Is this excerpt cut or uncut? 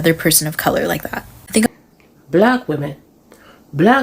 cut